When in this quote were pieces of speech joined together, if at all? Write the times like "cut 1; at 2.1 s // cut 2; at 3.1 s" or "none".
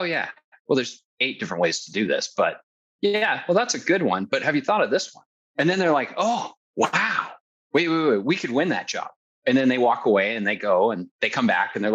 cut 1; at 5.3 s // cut 2; at 6.6 s // cut 3; at 7.5 s